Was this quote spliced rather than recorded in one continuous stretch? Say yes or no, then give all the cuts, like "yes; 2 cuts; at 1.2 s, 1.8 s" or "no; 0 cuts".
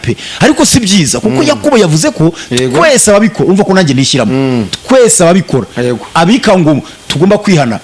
no; 0 cuts